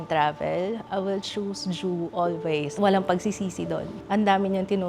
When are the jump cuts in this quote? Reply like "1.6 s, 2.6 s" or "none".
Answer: 2.7 s, 3.9 s